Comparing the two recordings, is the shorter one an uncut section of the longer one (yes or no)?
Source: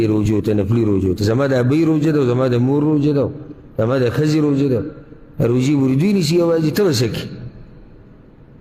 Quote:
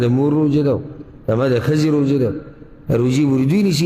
yes